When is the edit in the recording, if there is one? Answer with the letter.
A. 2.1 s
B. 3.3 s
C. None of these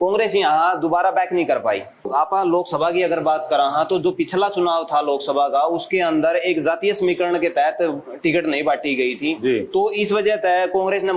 A